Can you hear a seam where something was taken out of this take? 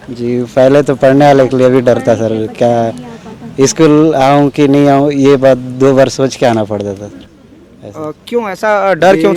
no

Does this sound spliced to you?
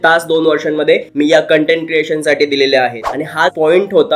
yes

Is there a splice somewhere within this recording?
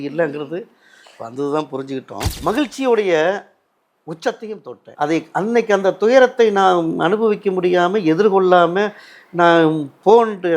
yes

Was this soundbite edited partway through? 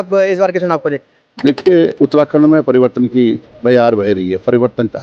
yes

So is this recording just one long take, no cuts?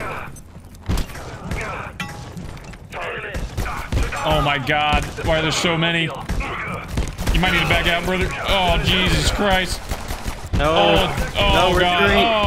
yes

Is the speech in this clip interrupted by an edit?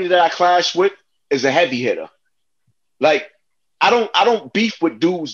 no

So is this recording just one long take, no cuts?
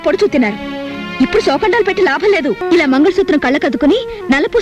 no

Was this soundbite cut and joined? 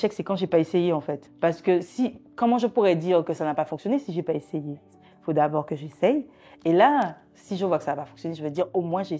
yes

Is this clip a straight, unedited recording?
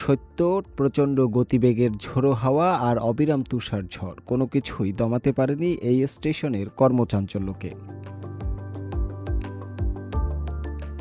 yes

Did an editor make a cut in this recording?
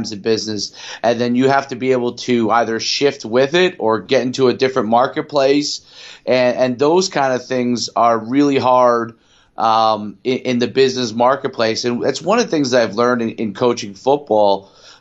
no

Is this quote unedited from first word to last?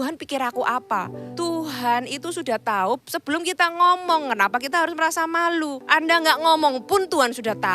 no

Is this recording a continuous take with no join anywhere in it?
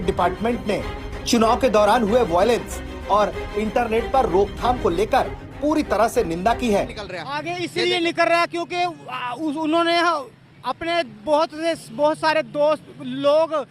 no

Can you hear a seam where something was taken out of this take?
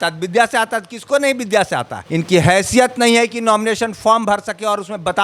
yes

